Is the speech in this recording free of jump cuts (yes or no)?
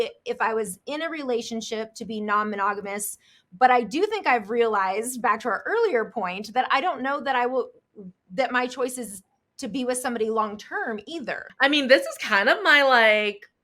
no